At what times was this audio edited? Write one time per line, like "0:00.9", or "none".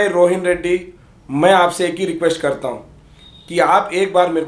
0:01.0